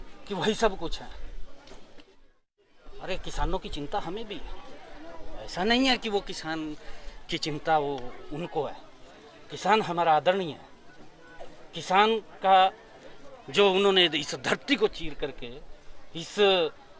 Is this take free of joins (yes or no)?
yes